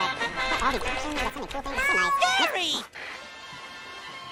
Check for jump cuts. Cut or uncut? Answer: uncut